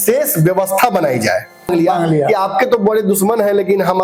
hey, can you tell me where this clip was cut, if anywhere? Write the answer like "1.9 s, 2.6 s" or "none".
1.7 s